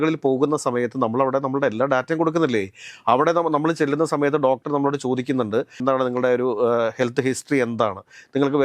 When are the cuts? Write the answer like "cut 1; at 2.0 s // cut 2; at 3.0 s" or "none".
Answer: cut 1; at 5.8 s